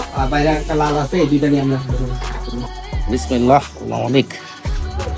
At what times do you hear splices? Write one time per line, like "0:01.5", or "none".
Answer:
none